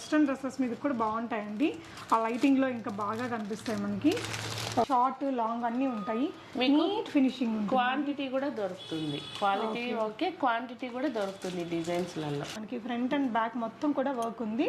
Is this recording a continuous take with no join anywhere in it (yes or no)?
no